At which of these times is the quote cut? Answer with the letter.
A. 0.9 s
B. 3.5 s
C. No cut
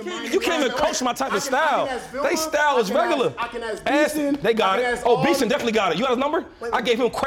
C